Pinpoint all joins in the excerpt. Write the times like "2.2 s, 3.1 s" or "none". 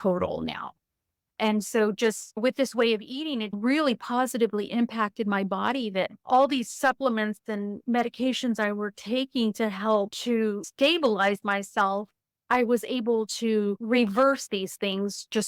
none